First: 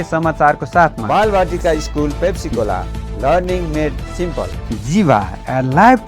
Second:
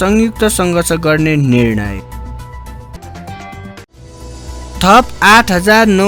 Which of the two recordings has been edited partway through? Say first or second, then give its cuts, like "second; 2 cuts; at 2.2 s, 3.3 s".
first; 2 cuts; at 1.0 s, 4.6 s